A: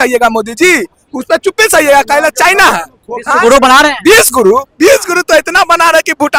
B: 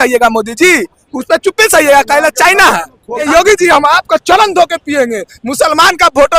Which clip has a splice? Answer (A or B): B